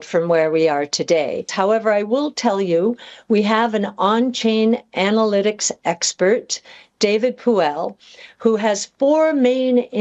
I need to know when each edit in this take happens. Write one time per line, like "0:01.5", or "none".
0:01.5